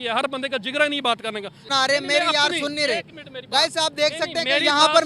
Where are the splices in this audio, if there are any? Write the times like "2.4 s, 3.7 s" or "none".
1.6 s